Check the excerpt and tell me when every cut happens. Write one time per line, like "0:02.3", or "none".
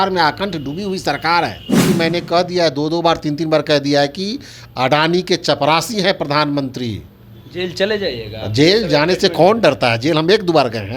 0:01.9